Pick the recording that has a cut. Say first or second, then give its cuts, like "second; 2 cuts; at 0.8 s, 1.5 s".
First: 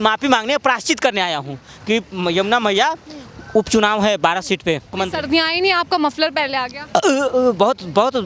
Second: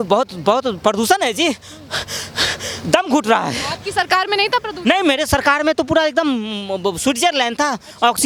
first; 1 cut; at 4.9 s